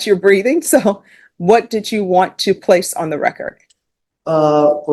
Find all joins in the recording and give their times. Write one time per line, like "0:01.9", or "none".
none